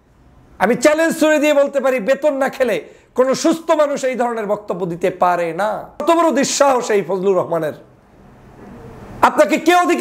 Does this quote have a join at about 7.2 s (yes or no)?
no